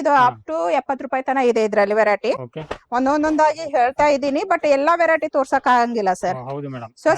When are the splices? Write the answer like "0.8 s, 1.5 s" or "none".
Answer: none